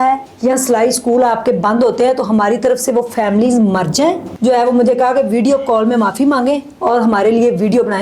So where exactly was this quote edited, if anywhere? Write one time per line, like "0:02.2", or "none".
0:04.3